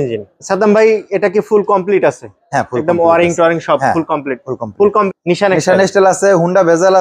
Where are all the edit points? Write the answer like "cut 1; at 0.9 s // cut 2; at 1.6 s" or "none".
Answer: cut 1; at 5.1 s

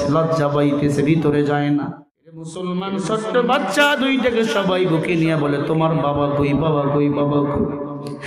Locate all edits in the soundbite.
cut 1; at 2.5 s

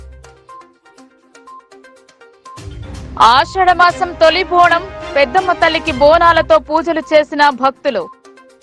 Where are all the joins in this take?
none

